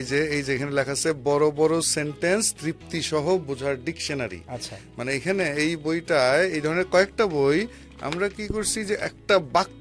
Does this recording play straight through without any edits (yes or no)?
yes